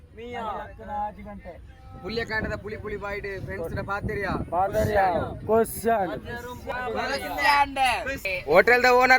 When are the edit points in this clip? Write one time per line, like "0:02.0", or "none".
0:06.5
0:08.3